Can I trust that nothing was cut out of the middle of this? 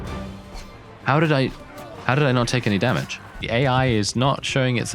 no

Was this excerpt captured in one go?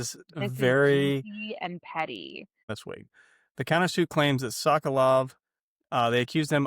no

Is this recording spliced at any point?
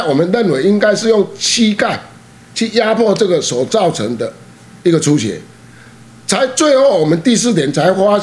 no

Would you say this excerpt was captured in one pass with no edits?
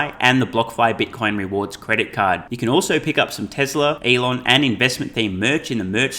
no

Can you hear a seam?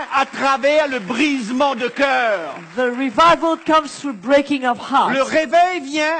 no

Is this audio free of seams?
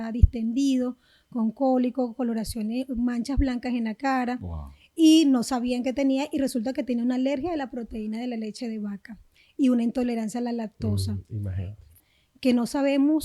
no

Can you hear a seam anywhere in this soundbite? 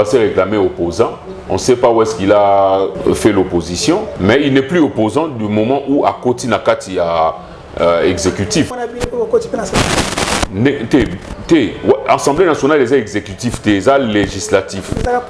yes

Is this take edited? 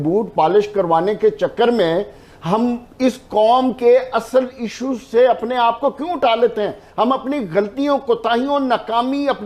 no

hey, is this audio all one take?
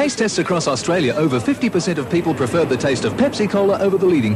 yes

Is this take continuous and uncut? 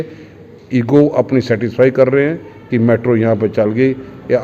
yes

